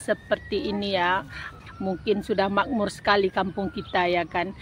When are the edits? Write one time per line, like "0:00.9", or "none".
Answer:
0:01.5